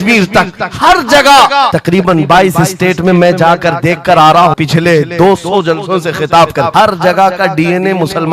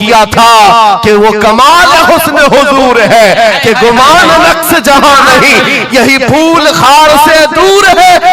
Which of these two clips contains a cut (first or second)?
first